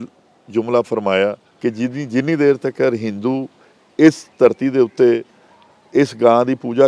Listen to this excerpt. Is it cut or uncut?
cut